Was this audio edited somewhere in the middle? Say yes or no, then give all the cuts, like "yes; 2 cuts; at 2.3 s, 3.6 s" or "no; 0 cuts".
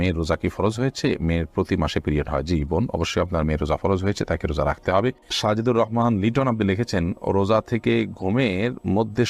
no; 0 cuts